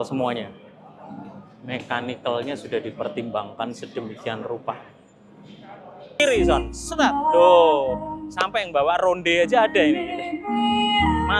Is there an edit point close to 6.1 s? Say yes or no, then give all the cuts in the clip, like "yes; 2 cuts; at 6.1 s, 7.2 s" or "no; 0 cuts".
yes; 1 cut; at 6.1 s